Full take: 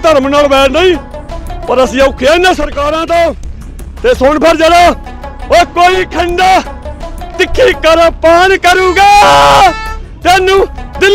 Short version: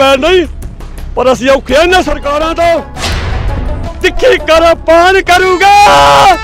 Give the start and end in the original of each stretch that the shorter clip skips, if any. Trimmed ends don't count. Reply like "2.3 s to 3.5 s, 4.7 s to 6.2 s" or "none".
3.9 s to 6.7 s